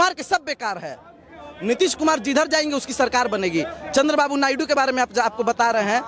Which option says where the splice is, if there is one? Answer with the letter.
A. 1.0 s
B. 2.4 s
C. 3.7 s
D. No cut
D